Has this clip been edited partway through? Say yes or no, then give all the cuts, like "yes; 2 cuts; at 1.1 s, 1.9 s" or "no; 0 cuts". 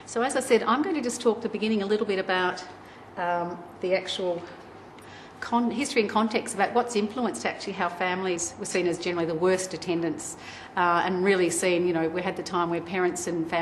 no; 0 cuts